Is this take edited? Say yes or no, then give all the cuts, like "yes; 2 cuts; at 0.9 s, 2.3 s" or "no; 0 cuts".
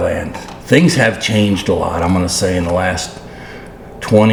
no; 0 cuts